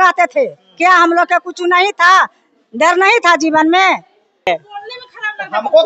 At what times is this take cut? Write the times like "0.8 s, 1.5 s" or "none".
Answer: 4.5 s